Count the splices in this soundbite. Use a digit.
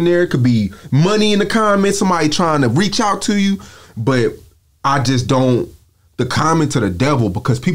0